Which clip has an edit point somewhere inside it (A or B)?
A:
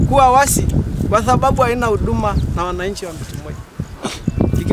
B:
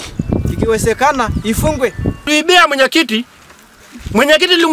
B